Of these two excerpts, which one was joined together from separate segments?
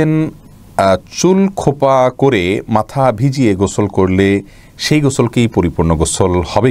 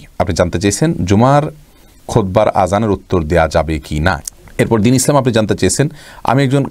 second; 1 cut; at 4.3 s

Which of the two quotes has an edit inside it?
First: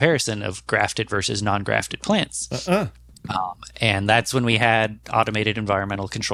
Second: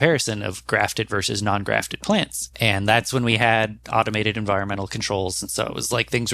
second; 1 cut; at 2.4 s

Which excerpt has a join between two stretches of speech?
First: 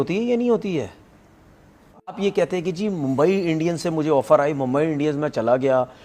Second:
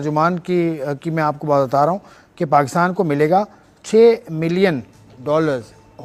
first; 1 cut; at 2.2 s

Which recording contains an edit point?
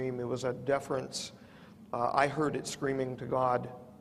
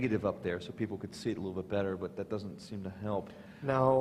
second; 1 cut; at 2.7 s

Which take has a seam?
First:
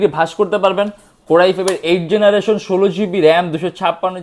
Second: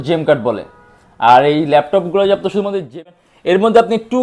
second; 1 cut; at 3.1 s

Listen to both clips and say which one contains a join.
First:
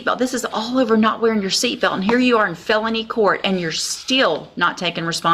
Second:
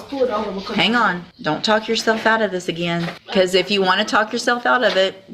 second; 2 cuts; at 1.3 s, 3.2 s

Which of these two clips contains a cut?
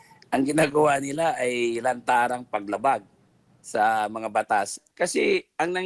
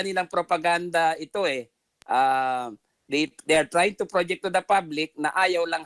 first; 1 cut; at 4.8 s

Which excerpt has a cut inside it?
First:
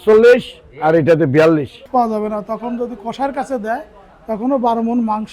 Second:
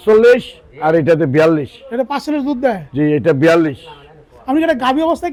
first; 1 cut; at 1.9 s

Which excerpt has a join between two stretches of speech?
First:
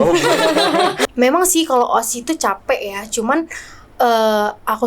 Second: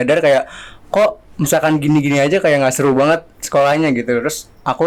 first; 1 cut; at 1.0 s

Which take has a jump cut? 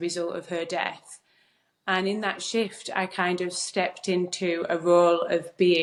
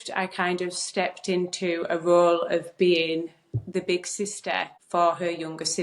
second; 1 cut; at 4.8 s

